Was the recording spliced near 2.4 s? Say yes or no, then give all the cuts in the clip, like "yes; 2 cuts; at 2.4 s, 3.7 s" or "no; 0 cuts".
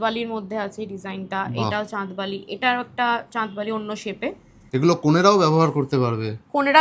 no; 1 cut; at 4.5 s